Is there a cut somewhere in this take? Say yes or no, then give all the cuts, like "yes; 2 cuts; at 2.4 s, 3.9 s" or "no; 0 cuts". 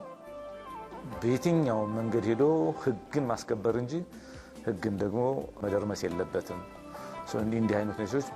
yes; 1 cut; at 5.5 s